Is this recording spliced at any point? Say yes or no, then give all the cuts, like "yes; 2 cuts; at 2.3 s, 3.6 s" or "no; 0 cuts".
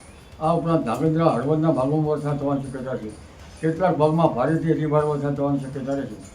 no; 0 cuts